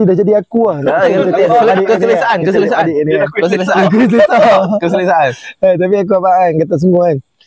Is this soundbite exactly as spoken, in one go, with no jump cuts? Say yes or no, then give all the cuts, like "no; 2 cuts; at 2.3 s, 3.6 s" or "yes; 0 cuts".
yes; 0 cuts